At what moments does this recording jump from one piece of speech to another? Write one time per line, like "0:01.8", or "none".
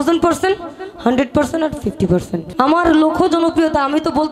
0:02.4